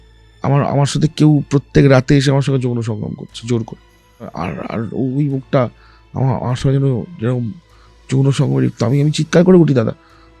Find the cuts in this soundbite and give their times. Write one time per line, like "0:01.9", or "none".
0:04.3

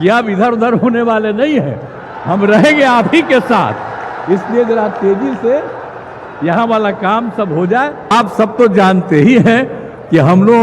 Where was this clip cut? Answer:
0:08.1

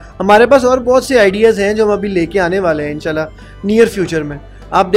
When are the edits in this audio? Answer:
none

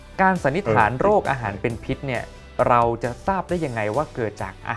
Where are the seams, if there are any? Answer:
none

